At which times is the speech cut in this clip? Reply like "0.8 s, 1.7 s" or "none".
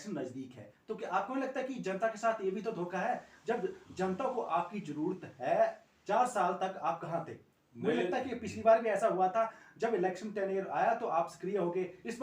none